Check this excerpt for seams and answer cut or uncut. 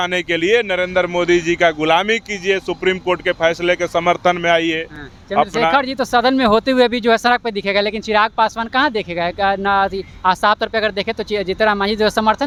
uncut